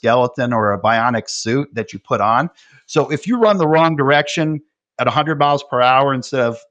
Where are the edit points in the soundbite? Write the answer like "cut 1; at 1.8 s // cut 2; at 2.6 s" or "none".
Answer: none